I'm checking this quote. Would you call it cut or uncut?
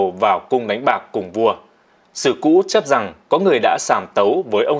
uncut